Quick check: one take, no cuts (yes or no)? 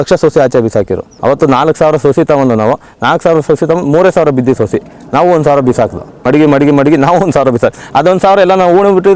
no